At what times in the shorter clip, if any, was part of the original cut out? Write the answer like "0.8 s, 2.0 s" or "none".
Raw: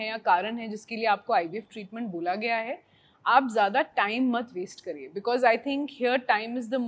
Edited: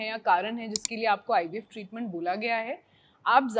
none